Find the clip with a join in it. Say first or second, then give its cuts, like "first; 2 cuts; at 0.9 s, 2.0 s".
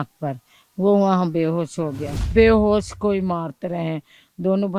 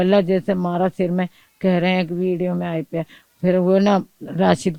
first; 1 cut; at 2.3 s